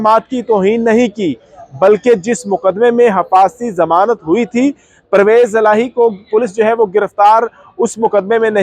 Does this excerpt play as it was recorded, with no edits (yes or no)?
yes